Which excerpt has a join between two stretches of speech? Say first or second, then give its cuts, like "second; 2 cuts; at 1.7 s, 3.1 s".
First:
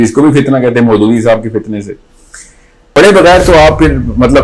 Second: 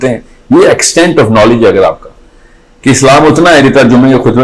first; 1 cut; at 2.9 s